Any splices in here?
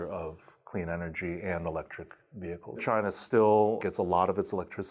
yes; 1 cut; at 2.8 s

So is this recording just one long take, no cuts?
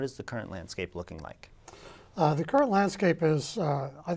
yes; 0 cuts

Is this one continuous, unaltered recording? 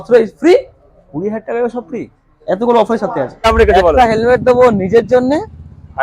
no; 1 cut; at 3.5 s

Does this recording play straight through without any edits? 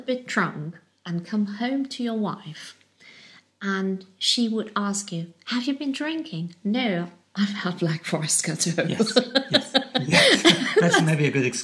yes; 0 cuts

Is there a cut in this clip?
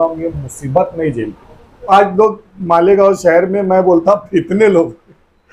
yes; 1 cut; at 1.8 s

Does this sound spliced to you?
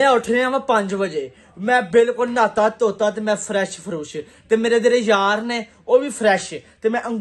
no; 0 cuts

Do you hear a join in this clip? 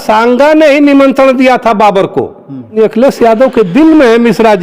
yes; 1 cut; at 2.8 s

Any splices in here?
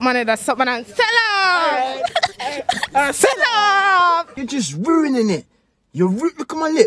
no; 0 cuts

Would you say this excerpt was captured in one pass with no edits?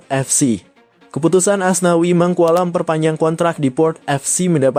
yes; 0 cuts

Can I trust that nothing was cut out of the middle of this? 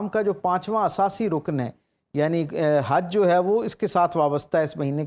yes; 0 cuts

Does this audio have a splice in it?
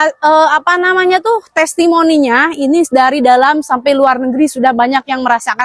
no; 0 cuts

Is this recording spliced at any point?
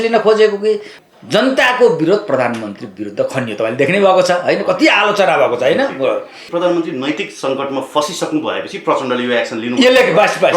yes; 2 cuts; at 0.9 s, 6.4 s

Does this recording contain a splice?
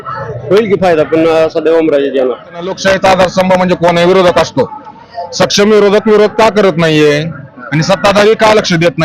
yes; 1 cut; at 2.8 s

